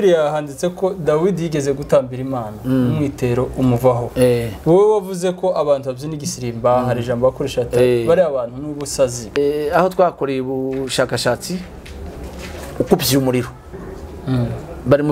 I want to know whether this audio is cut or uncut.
cut